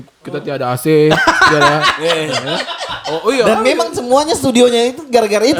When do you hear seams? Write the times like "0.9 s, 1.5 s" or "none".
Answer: none